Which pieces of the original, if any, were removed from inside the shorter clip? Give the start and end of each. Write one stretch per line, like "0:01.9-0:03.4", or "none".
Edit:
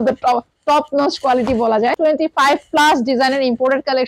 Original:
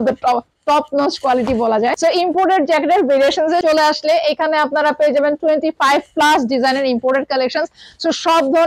0:02.0-0:05.4